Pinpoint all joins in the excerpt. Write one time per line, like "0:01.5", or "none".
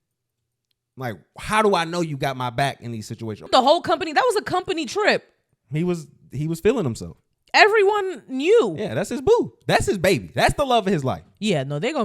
0:03.5